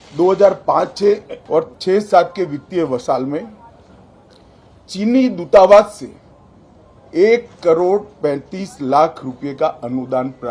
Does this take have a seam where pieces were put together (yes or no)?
yes